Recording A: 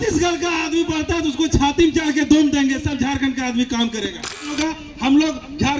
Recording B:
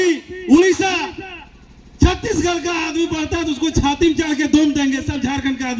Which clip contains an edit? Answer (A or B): A